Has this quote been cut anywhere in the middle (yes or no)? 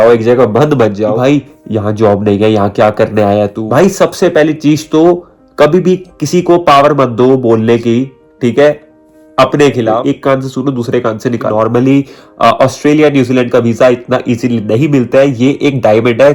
yes